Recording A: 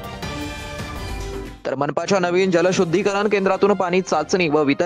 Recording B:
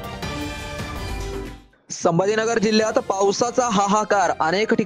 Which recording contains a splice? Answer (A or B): B